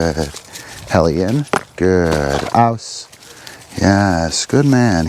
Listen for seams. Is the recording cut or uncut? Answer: cut